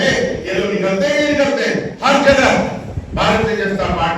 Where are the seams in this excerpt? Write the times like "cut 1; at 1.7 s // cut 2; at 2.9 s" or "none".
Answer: cut 1; at 1.9 s